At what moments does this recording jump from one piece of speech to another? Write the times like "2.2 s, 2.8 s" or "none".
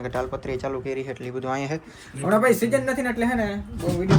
none